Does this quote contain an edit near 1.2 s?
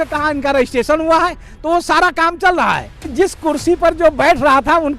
no; 1 cut; at 3.1 s

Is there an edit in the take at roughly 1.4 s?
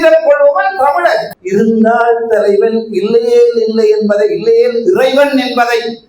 yes; 1 cut; at 1.4 s

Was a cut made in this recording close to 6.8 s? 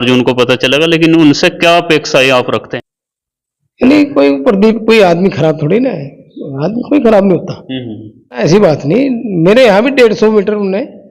no; 2 cuts; at 2.7 s, 8.4 s

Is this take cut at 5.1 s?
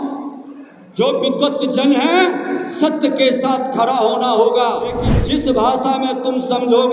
yes; 1 cut; at 5.1 s

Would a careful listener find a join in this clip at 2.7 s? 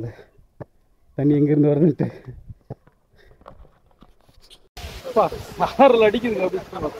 no; 1 cut; at 4.6 s

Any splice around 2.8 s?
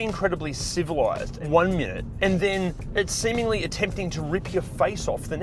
yes; 3 cuts; at 1.3 s, 2.0 s, 2.8 s

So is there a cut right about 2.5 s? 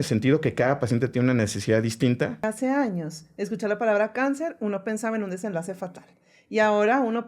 yes; 1 cut; at 2.5 s

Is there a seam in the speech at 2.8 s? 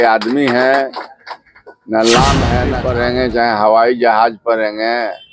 yes; 1 cut; at 2.8 s

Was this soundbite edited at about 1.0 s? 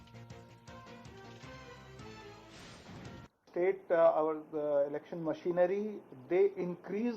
yes; 2 cuts; at 1.0 s, 3.9 s

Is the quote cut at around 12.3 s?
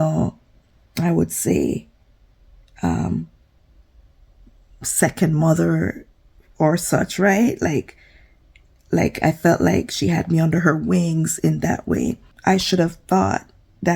yes; 1 cut; at 12.3 s

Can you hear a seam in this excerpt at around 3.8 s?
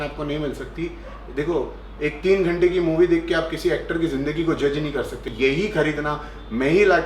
no; 1 cut; at 5.2 s

